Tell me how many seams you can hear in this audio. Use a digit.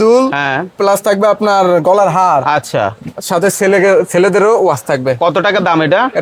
0